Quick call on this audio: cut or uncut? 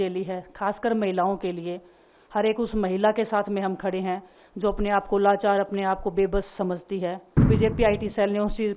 cut